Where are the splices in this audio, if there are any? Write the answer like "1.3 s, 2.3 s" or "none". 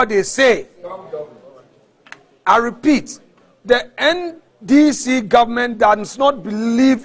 none